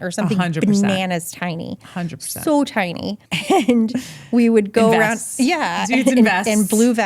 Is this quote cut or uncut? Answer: cut